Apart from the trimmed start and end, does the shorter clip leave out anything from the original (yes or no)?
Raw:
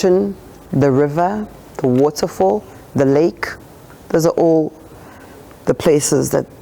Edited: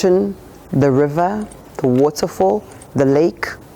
no